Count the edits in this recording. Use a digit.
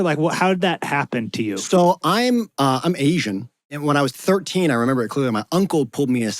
1